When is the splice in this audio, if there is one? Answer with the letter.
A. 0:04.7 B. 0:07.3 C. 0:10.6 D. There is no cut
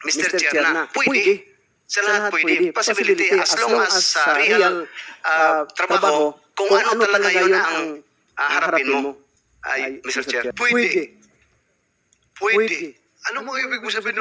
C